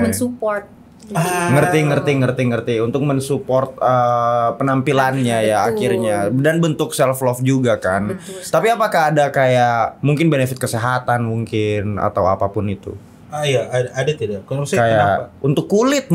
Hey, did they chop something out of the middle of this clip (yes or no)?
no